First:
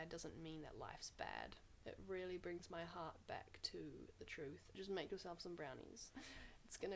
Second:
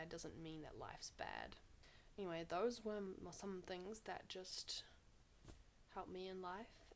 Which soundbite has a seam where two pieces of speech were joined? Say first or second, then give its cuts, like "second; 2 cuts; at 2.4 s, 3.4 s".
first; 2 cuts; at 1.7 s, 4.8 s